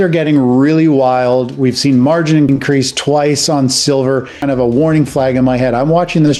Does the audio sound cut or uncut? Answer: cut